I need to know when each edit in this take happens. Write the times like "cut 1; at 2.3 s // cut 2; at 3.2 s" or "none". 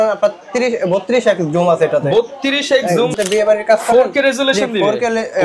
cut 1; at 3.1 s